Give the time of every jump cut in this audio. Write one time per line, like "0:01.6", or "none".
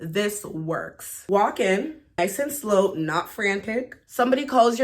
0:01.1
0:02.2
0:04.0